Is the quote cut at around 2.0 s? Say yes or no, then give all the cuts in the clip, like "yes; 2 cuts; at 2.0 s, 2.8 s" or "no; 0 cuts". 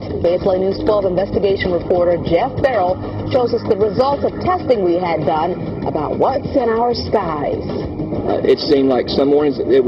yes; 1 cut; at 2.0 s